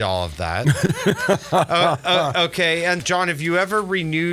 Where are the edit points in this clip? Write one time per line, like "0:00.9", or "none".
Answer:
0:03.0